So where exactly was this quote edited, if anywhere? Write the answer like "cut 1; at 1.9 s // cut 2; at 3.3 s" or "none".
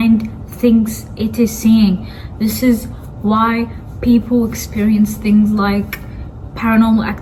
none